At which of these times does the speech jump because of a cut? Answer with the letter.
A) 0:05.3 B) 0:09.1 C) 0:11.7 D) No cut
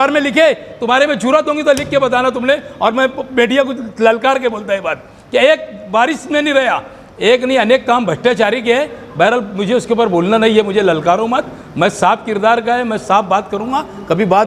D